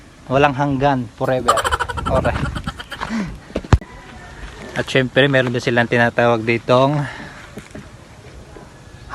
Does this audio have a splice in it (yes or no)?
no